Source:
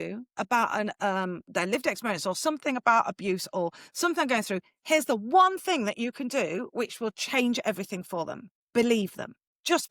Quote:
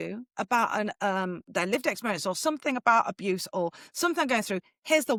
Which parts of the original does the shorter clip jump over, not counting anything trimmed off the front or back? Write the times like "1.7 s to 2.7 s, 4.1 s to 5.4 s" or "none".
none